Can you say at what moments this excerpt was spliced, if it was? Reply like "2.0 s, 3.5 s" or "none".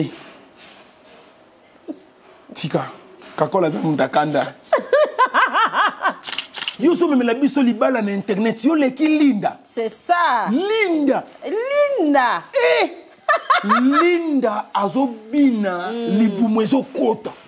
6.7 s